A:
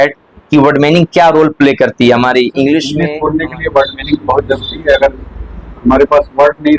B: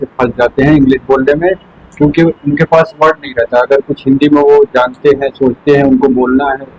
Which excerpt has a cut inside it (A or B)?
A